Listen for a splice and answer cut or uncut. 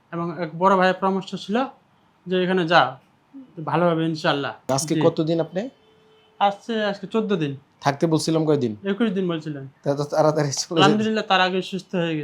cut